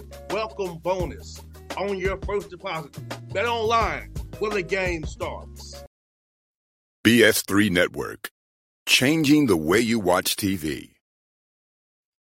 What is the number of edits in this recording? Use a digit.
1